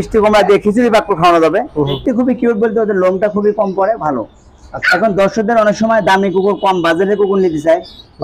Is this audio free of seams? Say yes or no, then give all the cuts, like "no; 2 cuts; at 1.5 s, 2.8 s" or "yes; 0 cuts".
no; 1 cut; at 2.0 s